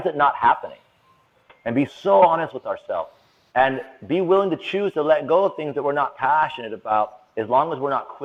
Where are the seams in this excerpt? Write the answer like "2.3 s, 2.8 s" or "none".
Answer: none